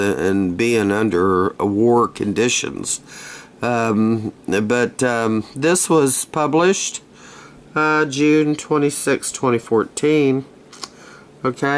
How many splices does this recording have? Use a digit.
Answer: 1